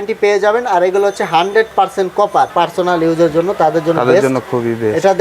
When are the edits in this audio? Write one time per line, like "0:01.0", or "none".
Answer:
0:02.5

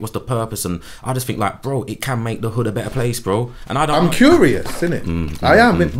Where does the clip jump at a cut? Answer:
0:03.9

